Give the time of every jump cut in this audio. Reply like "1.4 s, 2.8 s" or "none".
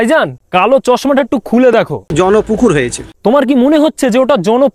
none